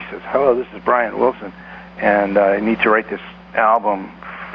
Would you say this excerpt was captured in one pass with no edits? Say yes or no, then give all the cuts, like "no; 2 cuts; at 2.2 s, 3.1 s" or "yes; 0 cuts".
yes; 0 cuts